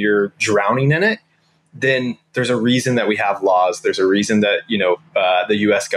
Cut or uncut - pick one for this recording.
uncut